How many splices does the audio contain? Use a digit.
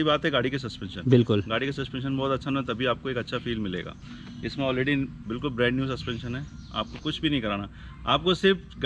0